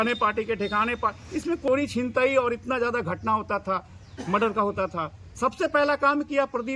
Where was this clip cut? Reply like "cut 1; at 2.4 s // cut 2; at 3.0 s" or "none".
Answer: cut 1; at 1.7 s